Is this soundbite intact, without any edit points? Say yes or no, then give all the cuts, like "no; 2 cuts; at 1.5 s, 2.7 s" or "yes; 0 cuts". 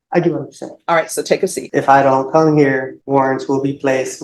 no; 2 cuts; at 1.6 s, 2.9 s